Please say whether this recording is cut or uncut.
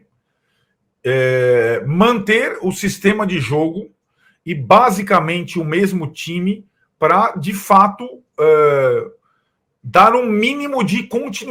uncut